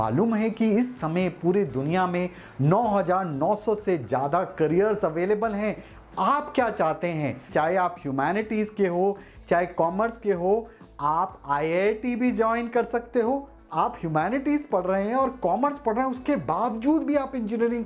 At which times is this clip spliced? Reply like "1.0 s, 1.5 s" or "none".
7.4 s, 13.6 s